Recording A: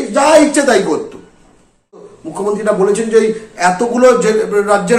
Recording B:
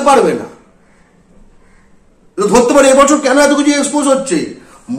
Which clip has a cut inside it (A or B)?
A